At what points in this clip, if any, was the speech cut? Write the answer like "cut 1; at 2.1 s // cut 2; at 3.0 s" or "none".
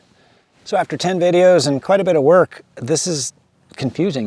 none